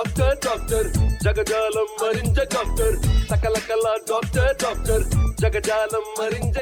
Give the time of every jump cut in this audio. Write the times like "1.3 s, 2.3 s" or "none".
none